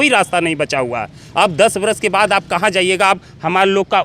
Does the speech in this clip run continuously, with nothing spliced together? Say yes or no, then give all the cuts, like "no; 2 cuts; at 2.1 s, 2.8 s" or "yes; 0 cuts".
yes; 0 cuts